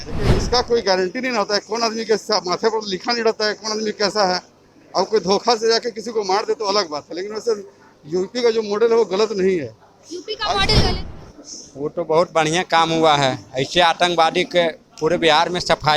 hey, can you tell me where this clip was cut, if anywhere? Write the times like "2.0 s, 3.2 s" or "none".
11.0 s